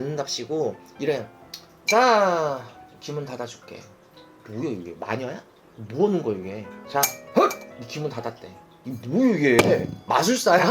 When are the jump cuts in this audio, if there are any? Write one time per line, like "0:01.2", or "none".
none